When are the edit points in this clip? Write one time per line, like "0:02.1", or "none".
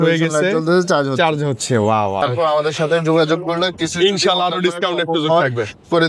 0:02.2